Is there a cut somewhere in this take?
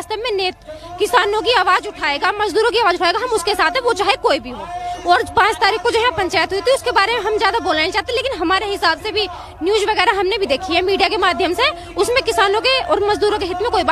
no; 0 cuts

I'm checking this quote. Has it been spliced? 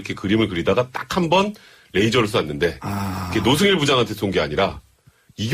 no; 0 cuts

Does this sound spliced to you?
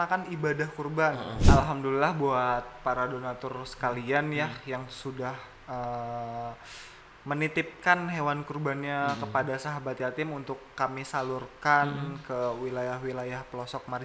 yes; 1 cut; at 1.5 s

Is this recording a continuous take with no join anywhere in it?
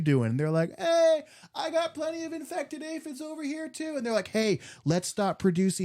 yes; 0 cuts

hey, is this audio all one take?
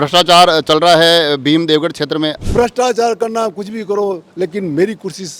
no; 1 cut; at 2.4 s

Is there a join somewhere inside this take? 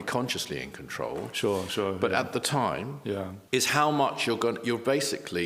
yes; 1 cut; at 3.4 s

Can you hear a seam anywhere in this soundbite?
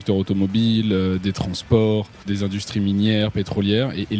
yes; 1 cut; at 2.2 s

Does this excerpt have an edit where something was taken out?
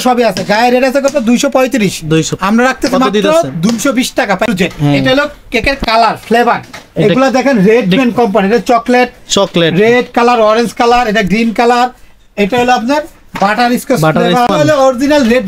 yes; 2 cuts; at 4.4 s, 14.5 s

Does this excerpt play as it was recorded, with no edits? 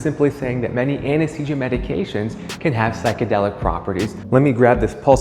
no; 1 cut; at 4.2 s

